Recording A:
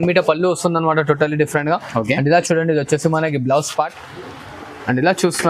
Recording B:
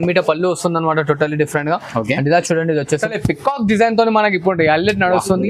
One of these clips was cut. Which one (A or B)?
B